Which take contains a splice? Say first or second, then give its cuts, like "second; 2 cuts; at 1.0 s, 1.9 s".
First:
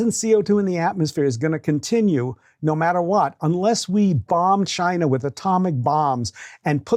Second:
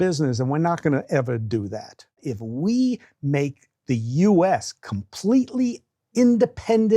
second; 1 cut; at 2.3 s